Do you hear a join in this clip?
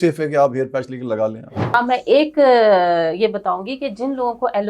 yes; 1 cut; at 1.7 s

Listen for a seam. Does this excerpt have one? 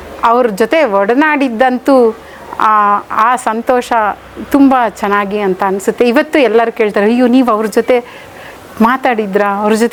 no; 0 cuts

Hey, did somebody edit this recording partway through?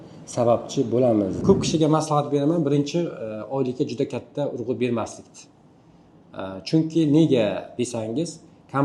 yes; 1 cut; at 1.4 s

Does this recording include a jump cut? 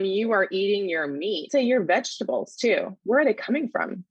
yes; 1 cut; at 1.5 s

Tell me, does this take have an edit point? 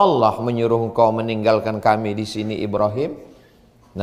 no; 0 cuts

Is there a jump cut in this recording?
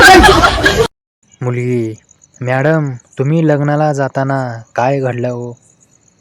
yes; 1 cut; at 1.0 s

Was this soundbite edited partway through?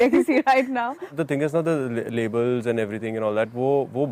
yes; 1 cut; at 1.2 s

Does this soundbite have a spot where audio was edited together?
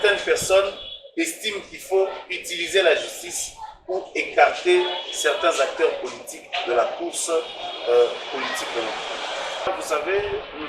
yes; 1 cut; at 9.7 s

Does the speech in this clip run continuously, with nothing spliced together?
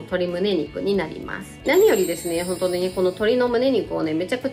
no; 1 cut; at 1.5 s

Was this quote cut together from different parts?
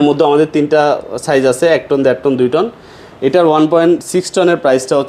no; 0 cuts

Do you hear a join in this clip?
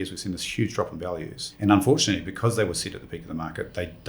yes; 1 cut; at 1.5 s

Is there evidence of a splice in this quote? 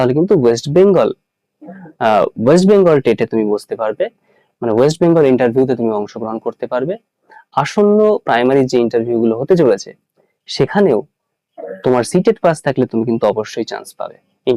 no; 0 cuts

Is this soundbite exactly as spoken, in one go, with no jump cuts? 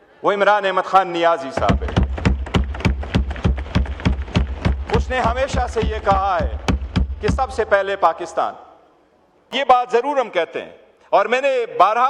no; 1 cut; at 9.5 s

